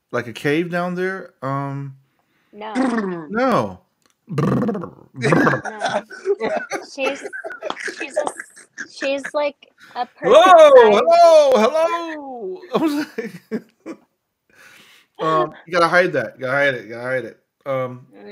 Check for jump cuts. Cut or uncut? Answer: uncut